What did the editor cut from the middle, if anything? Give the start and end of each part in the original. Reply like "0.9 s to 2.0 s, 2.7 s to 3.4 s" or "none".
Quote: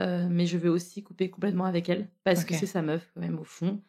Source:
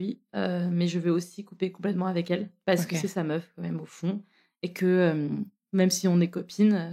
none